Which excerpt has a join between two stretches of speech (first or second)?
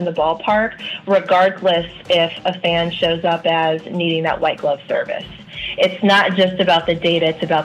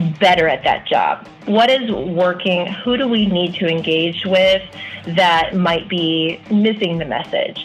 second